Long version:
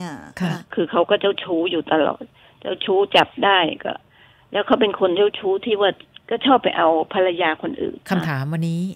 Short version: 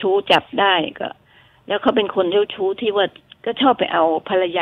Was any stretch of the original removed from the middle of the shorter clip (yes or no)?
no